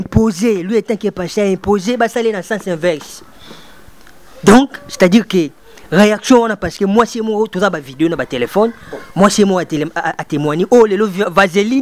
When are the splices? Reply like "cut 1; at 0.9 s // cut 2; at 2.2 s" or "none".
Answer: none